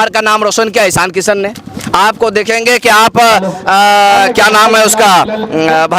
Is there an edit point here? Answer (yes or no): no